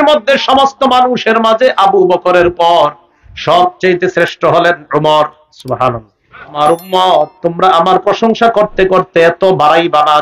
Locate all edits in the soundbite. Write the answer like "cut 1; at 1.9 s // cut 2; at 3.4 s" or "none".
cut 1; at 6.6 s